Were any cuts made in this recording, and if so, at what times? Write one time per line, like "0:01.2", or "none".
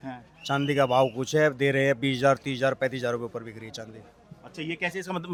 none